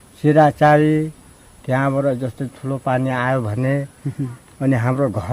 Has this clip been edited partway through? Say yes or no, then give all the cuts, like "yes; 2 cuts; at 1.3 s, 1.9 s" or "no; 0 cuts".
no; 0 cuts